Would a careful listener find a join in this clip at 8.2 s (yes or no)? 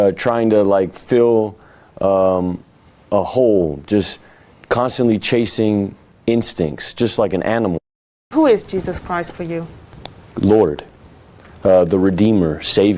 yes